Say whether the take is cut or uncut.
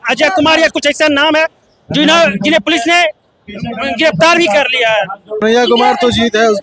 cut